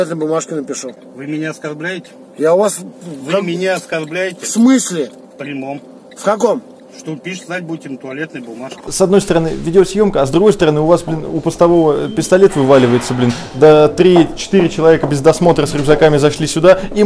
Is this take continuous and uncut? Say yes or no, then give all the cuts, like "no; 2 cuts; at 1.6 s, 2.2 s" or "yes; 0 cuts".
no; 3 cuts; at 1.1 s, 6.8 s, 8.7 s